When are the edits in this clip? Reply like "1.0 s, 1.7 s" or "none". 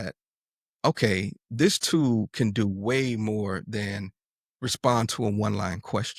none

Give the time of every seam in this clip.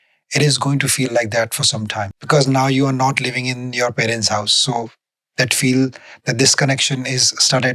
2.1 s

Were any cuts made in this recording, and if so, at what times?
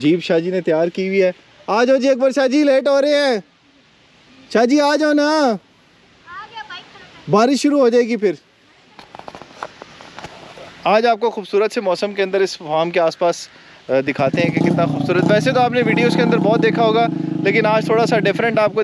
none

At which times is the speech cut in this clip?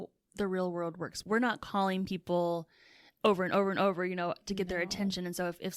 1.2 s

